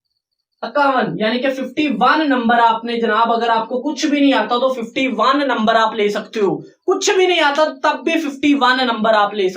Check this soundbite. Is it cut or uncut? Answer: uncut